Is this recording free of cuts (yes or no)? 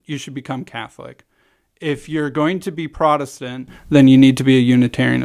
yes